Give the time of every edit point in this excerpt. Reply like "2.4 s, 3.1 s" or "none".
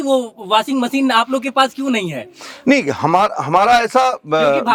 none